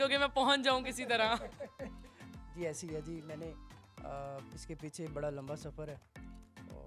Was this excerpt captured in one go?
yes; 0 cuts

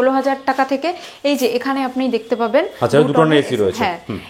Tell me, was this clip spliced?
no; 0 cuts

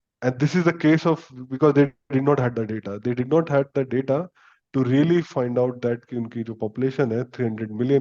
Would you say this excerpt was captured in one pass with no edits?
yes; 0 cuts

